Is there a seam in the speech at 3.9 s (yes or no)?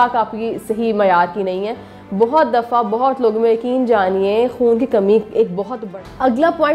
no